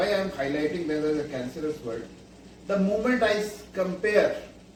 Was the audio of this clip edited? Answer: no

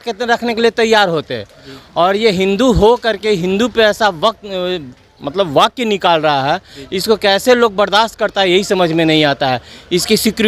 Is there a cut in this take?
no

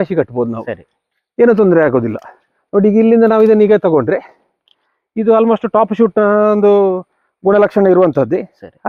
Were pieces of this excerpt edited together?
no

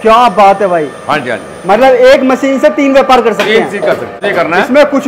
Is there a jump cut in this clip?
yes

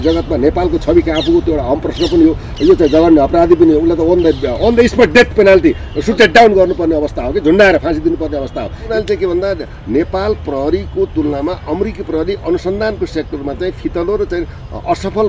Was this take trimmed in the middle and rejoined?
yes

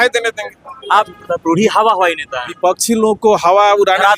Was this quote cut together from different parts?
yes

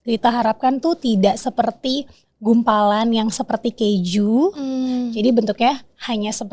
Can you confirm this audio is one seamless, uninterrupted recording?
yes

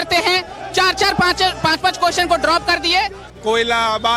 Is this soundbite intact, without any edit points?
no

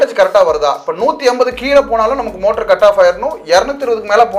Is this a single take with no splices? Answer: yes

